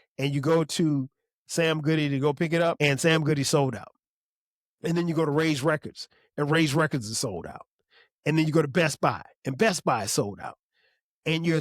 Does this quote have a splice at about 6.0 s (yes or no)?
no